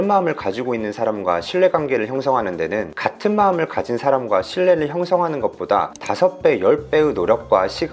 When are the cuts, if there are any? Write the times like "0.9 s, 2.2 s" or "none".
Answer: 2.9 s, 6.0 s